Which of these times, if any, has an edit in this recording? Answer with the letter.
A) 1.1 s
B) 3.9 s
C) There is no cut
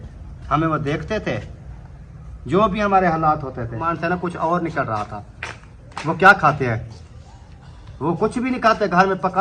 B